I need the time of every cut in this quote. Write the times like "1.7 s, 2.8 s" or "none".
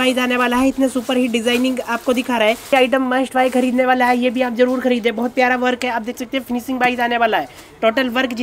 2.7 s